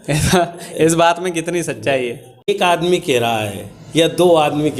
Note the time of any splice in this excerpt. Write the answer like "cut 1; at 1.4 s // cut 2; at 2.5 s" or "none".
cut 1; at 2.5 s